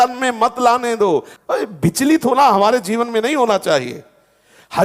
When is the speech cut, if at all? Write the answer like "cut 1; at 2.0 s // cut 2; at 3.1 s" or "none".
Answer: cut 1; at 1.3 s